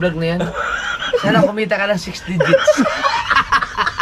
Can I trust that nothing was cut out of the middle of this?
yes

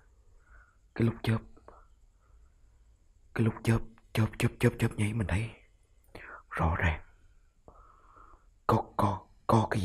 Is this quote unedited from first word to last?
yes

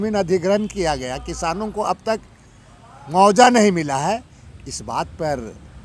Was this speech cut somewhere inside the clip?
no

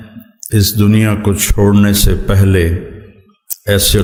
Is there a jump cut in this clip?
no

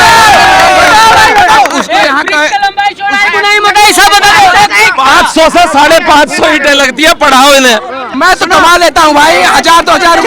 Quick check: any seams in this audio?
yes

